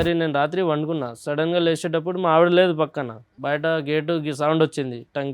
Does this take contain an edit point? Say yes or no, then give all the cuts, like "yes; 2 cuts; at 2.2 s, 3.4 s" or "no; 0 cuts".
yes; 1 cut; at 3.3 s